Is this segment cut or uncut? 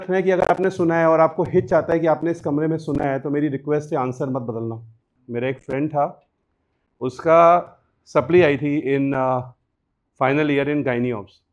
cut